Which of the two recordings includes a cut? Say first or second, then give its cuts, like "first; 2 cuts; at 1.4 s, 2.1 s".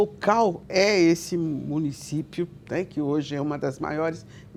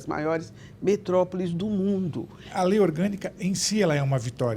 second; 1 cut; at 2.5 s